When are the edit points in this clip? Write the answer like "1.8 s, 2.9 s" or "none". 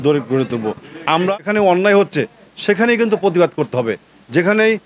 1.3 s